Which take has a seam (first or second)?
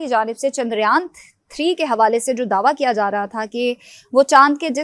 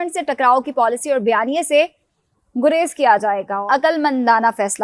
second